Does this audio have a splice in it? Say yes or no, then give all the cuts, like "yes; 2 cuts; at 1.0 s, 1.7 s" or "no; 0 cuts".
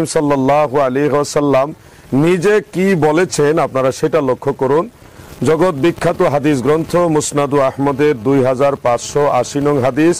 no; 0 cuts